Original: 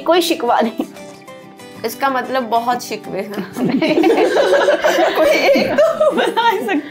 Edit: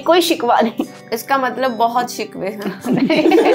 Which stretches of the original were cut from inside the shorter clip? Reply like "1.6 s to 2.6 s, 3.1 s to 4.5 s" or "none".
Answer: 1.1 s to 1.8 s